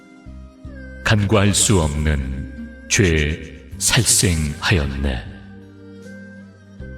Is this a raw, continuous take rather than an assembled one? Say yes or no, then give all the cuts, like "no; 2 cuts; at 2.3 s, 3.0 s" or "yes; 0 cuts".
no; 1 cut; at 5.5 s